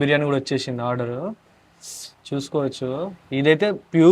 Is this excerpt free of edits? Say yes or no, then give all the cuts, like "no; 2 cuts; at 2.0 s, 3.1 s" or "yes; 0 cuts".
no; 1 cut; at 3.2 s